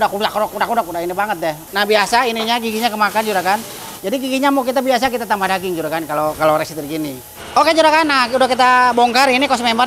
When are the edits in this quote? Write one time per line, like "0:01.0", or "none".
0:01.6
0:07.3

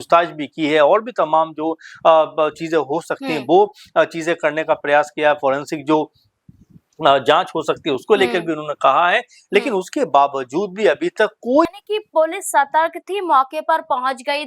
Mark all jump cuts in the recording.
0:11.7

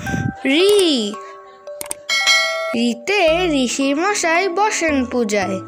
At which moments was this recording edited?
none

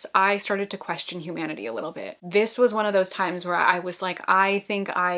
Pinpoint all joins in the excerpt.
none

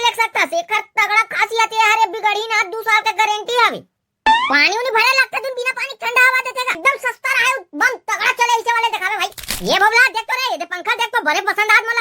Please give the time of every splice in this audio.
0:06.8

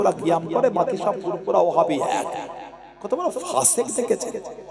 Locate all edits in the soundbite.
none

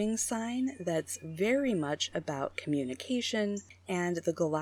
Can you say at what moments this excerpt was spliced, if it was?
0:03.7

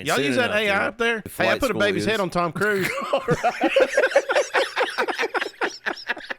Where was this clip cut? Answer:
0:01.3

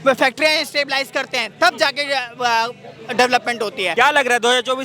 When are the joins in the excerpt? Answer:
0:03.9

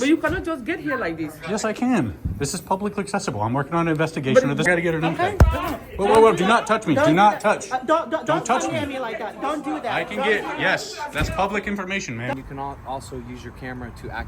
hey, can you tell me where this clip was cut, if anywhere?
0:04.6
0:12.3

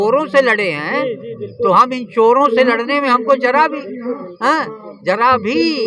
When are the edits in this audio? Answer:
none

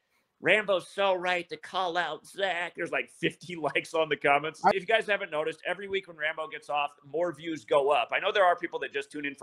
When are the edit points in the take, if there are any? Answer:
0:04.7

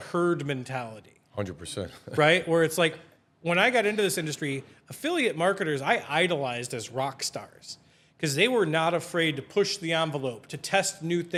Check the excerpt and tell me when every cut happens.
none

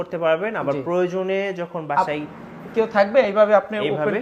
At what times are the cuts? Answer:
none

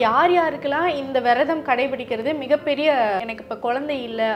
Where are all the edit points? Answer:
0:03.2

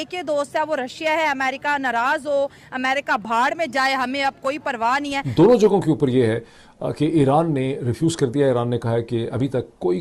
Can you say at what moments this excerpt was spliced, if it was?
none

